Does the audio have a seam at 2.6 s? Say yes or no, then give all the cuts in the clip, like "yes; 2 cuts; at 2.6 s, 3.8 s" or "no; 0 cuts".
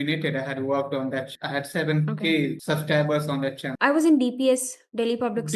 yes; 3 cuts; at 1.3 s, 2.6 s, 3.7 s